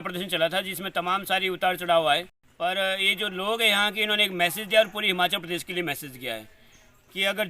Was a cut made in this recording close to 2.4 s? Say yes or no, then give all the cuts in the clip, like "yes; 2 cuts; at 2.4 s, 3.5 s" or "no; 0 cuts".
yes; 1 cut; at 2.4 s